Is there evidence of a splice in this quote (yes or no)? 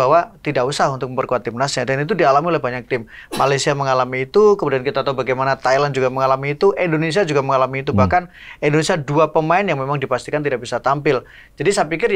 no